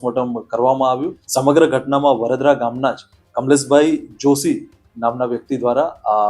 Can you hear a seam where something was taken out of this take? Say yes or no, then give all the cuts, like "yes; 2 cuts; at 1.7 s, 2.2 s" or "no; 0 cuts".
yes; 1 cut; at 1.2 s